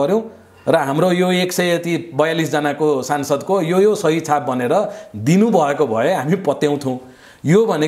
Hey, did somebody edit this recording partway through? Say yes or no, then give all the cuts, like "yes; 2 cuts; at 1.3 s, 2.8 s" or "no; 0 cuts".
no; 0 cuts